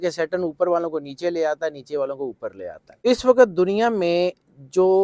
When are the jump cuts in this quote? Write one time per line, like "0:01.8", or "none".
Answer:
0:03.0